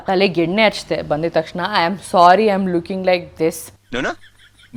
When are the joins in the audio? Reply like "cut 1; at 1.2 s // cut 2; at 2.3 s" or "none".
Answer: none